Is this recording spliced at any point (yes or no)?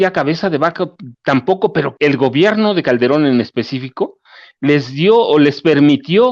yes